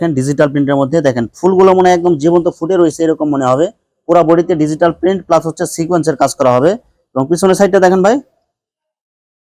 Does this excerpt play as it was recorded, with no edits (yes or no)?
yes